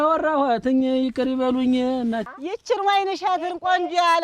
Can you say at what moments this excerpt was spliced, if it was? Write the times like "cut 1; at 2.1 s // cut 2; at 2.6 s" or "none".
cut 1; at 2.3 s